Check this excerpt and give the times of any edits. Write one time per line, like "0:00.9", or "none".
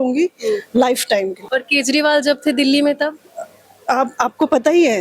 none